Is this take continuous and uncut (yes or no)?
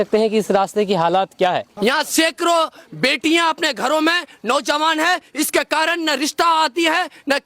no